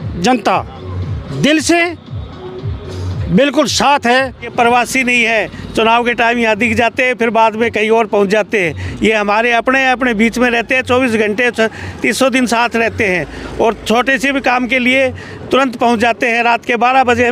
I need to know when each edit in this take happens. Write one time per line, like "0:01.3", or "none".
0:04.5